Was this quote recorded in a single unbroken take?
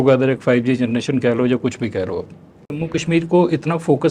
no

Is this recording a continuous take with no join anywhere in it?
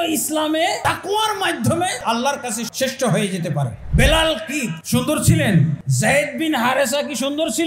no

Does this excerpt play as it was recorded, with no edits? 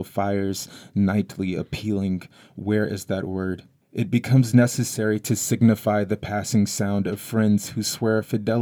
no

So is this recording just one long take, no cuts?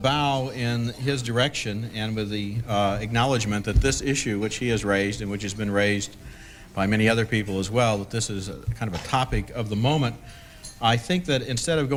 yes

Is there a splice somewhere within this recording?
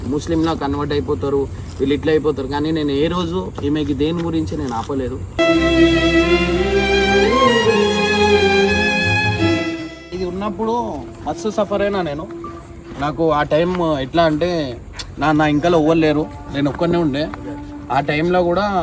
no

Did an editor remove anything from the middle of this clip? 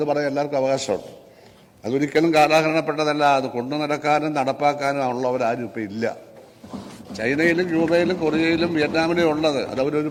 no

